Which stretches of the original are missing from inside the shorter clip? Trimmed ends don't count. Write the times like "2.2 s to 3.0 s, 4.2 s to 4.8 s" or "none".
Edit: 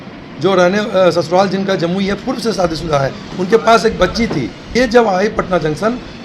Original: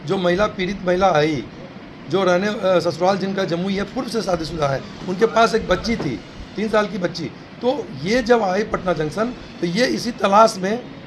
6.3 s to 8.0 s